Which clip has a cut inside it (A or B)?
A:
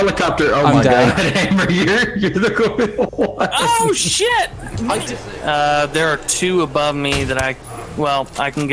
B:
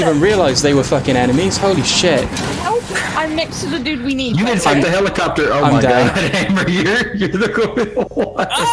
A